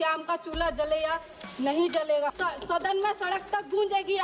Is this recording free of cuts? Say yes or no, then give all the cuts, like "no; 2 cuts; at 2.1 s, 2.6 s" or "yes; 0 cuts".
no; 1 cut; at 2.4 s